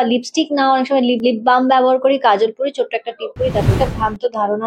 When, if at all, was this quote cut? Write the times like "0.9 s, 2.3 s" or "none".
1.2 s, 3.7 s